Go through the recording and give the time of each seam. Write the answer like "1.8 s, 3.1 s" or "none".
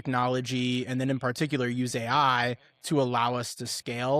none